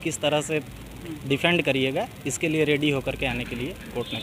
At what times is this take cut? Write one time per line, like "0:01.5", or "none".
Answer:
none